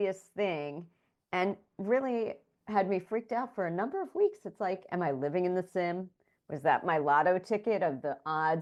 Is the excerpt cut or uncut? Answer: uncut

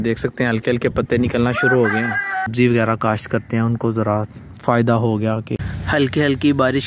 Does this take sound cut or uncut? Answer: cut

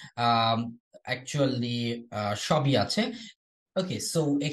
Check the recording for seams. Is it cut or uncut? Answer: cut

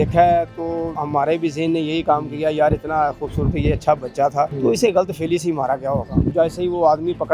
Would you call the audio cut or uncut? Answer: cut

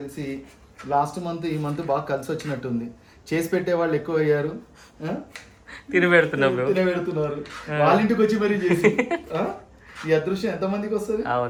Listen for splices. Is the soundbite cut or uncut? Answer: uncut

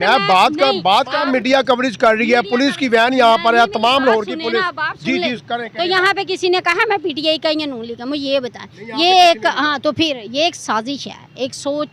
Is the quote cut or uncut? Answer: cut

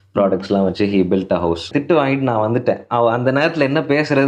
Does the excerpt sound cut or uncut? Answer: cut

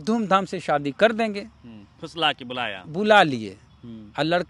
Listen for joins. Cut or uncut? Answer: uncut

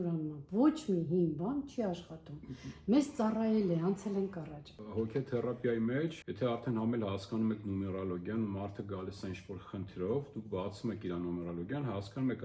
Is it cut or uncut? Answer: cut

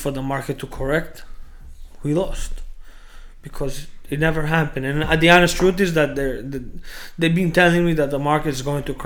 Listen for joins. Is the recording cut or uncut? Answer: uncut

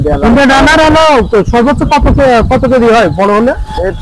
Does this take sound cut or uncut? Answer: uncut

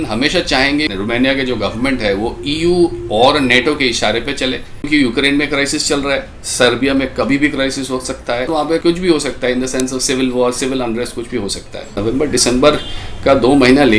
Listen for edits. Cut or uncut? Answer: cut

